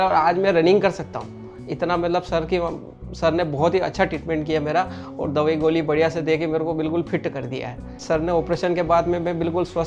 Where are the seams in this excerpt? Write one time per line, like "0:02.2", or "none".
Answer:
0:08.0